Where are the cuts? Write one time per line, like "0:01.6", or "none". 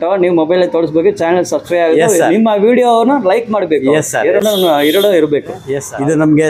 none